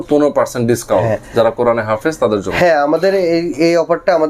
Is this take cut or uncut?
uncut